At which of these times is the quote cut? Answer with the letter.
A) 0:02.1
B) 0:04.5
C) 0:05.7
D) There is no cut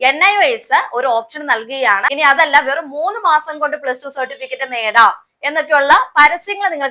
A